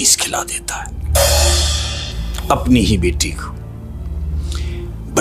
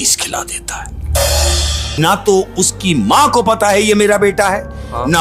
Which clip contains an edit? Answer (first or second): second